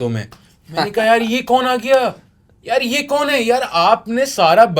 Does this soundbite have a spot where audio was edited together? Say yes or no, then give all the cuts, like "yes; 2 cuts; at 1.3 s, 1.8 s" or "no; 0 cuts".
no; 0 cuts